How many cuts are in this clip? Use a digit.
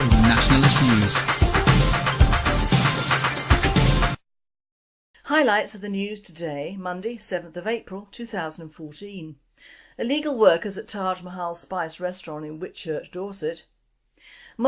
1